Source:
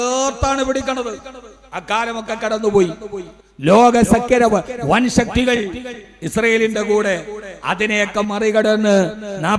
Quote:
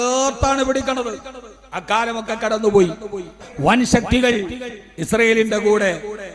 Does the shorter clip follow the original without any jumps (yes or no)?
no